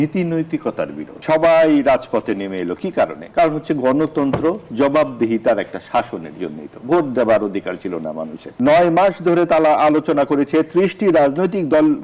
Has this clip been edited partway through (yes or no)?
yes